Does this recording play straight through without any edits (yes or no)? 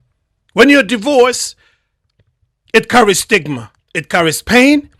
yes